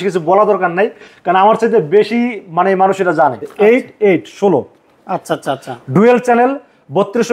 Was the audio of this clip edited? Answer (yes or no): yes